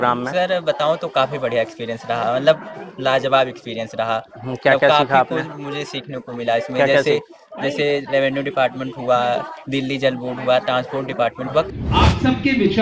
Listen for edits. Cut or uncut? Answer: cut